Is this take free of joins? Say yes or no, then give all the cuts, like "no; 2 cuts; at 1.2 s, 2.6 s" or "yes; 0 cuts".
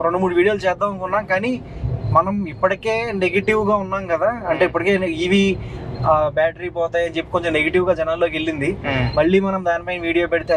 yes; 0 cuts